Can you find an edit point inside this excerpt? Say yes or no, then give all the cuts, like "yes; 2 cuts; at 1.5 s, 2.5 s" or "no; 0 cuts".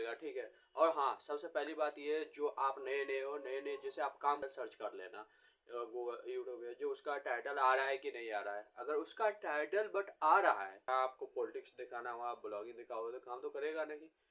yes; 2 cuts; at 4.4 s, 10.9 s